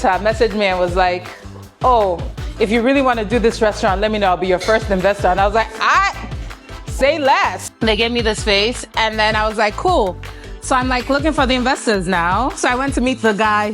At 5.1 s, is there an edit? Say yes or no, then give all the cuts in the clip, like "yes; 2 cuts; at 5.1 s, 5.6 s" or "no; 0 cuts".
no; 1 cut; at 7.7 s